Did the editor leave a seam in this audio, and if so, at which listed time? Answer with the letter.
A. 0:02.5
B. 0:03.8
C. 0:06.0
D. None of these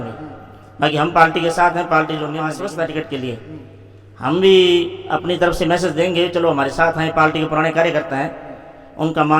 A